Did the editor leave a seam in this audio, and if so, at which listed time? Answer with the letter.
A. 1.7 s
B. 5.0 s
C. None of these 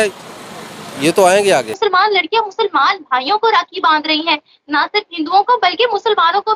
A